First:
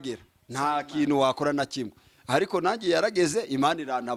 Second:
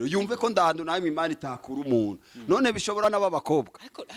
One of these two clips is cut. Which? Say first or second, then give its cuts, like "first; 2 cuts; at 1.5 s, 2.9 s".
second; 1 cut; at 3.0 s